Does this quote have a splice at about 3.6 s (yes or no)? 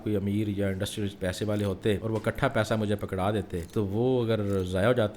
yes